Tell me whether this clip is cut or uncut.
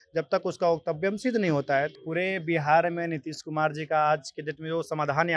cut